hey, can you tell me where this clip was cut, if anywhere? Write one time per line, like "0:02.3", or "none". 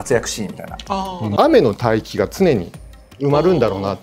0:01.3